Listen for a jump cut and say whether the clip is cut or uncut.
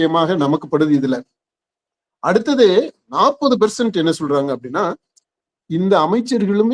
uncut